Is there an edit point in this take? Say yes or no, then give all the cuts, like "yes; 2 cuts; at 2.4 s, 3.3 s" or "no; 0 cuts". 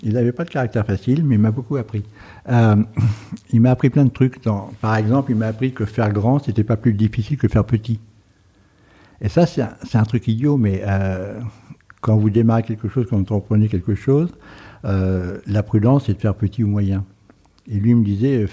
no; 0 cuts